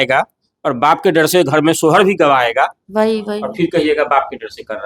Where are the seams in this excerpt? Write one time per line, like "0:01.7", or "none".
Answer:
0:02.8